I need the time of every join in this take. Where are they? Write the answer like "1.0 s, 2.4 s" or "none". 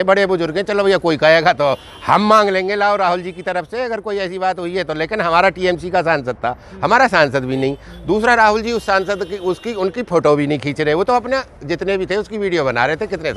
none

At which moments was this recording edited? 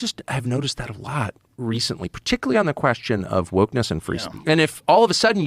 4.3 s

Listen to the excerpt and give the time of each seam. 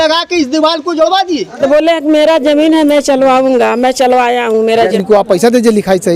1.6 s, 4.9 s

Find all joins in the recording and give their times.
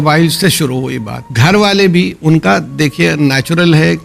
1.2 s

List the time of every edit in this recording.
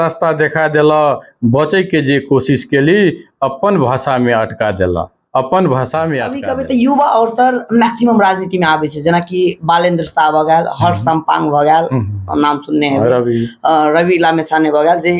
6.4 s

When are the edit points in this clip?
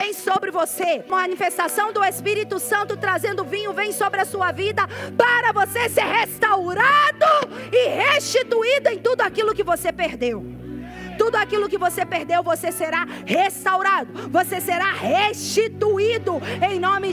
1.1 s

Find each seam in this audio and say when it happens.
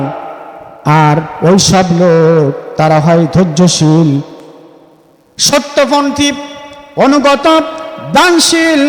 none

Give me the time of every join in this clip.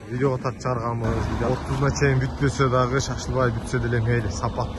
1.3 s

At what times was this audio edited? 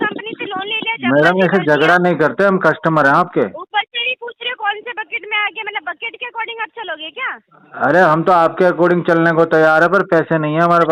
none

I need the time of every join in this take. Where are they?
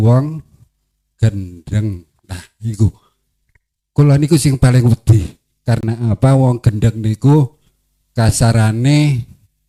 none

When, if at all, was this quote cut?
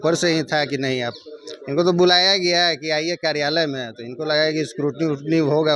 none

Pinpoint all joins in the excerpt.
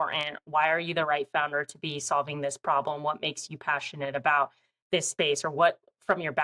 none

